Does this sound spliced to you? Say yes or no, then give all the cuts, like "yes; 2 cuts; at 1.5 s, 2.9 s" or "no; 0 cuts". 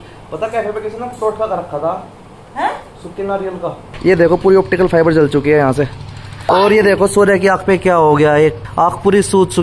yes; 3 cuts; at 3.9 s, 6.3 s, 8.6 s